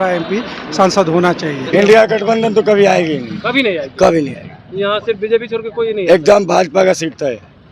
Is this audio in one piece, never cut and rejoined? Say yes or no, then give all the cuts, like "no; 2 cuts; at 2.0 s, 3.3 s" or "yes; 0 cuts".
no; 1 cut; at 1.6 s